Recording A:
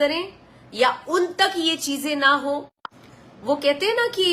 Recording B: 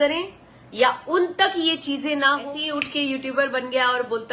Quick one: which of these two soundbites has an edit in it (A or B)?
B